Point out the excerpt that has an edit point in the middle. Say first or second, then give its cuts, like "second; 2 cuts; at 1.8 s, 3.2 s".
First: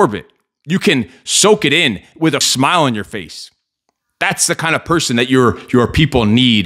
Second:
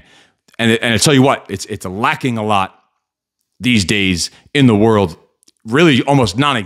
first; 1 cut; at 2.5 s